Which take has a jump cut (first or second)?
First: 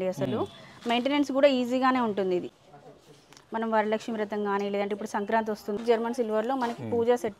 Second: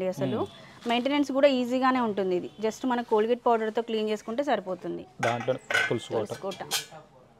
first